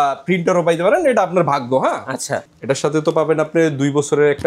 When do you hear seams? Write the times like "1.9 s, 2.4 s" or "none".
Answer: 2.5 s